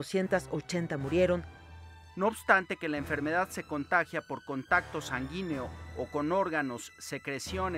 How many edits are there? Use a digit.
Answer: 1